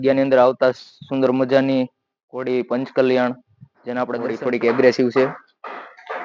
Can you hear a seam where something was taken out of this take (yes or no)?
yes